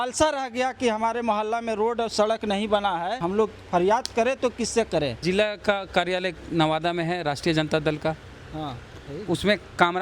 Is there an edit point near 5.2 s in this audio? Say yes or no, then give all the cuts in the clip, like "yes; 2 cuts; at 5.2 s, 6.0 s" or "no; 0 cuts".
yes; 2 cuts; at 3.2 s, 5.2 s